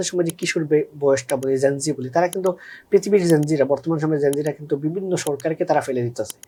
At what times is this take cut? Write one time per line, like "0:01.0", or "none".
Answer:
none